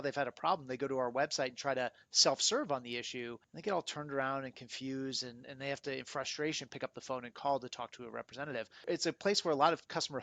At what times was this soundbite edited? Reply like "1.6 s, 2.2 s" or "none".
3.4 s, 8.8 s